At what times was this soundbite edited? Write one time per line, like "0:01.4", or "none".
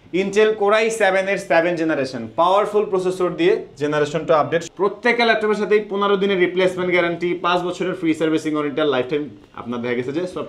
0:04.7